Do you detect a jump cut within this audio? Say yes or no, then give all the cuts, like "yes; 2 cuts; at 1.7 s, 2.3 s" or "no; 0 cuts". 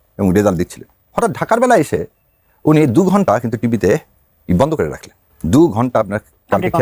no; 0 cuts